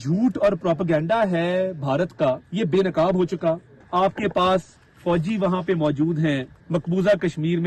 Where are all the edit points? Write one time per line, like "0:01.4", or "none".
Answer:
0:02.5
0:03.7
0:06.5